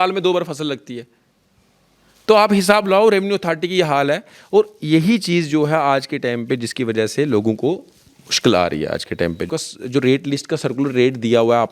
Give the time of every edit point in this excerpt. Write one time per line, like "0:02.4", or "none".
0:09.5